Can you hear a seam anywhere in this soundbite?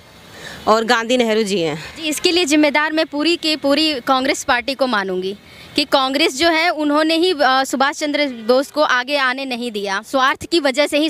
yes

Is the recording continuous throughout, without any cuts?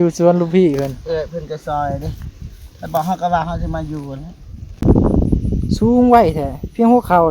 no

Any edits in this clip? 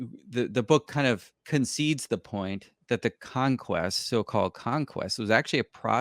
yes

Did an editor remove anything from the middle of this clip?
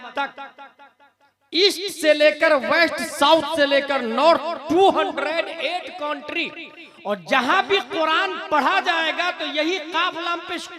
no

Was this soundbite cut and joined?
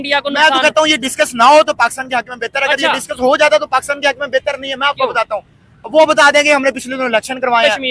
no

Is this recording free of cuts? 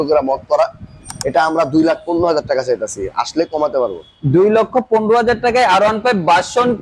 yes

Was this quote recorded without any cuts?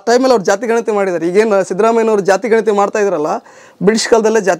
yes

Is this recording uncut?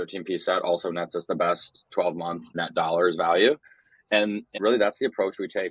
no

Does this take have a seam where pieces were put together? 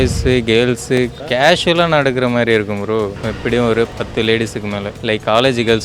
yes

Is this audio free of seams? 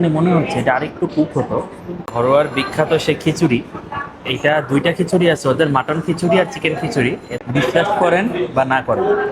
no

